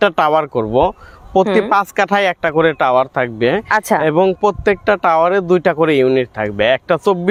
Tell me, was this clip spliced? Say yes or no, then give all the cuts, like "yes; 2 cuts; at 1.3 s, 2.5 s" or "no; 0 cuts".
no; 0 cuts